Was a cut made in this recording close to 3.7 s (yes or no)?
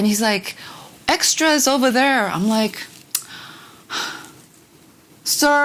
no